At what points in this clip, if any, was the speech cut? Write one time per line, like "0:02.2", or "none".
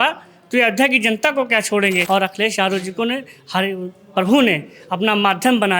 0:02.0